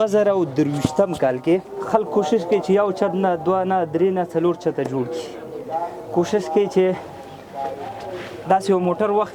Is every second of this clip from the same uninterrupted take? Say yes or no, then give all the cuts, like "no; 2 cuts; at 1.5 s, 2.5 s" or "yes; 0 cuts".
no; 1 cut; at 1.8 s